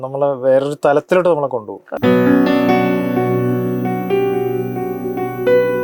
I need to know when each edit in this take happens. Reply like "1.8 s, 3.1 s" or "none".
none